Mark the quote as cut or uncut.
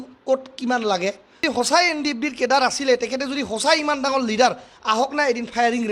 cut